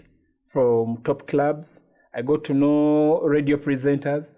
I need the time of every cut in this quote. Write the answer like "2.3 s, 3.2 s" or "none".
none